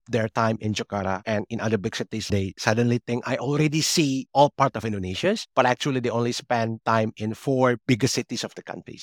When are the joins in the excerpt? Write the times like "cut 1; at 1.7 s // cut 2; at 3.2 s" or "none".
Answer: cut 1; at 2.3 s